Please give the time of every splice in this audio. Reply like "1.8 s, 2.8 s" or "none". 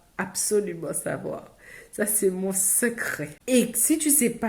3.3 s